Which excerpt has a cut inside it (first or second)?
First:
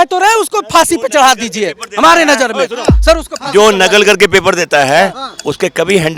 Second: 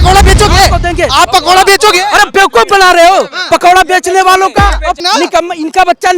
second